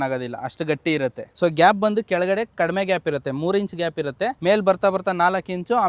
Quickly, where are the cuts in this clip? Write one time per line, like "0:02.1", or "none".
0:01.2
0:04.4